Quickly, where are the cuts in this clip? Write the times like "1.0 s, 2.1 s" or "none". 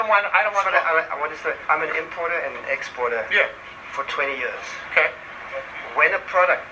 1.6 s